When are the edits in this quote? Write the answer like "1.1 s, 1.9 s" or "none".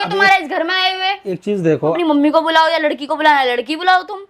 1.9 s